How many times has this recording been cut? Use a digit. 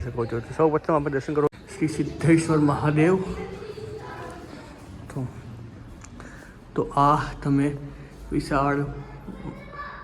1